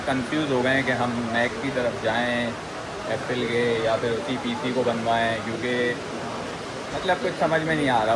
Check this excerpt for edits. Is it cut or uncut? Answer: uncut